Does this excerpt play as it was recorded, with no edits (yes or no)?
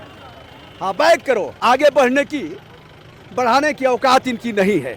no